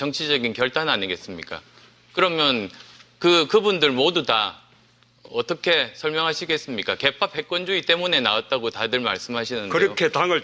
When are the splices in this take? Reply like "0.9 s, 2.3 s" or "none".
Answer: 7.5 s